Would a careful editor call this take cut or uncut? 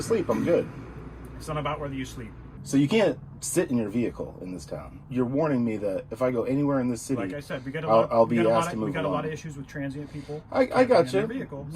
cut